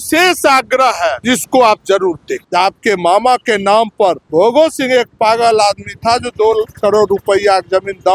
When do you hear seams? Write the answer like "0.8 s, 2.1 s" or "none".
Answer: 1.2 s, 2.3 s, 4.2 s